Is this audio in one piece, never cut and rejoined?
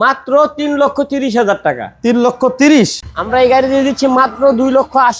no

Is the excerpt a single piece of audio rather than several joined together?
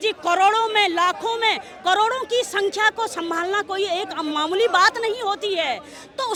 yes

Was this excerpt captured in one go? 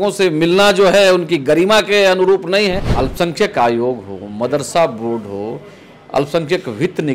no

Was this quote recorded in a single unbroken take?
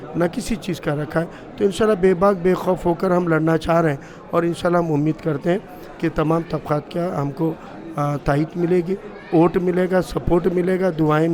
yes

